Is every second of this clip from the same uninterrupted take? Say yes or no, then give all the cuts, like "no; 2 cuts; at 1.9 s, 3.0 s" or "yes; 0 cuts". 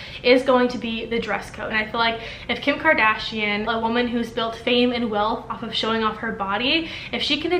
no; 2 cuts; at 1.7 s, 3.7 s